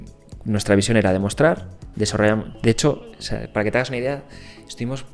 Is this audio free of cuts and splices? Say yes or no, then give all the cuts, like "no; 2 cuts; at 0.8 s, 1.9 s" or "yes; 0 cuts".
yes; 0 cuts